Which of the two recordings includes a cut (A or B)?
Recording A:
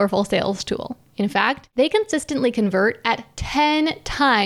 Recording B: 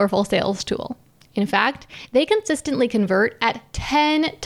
A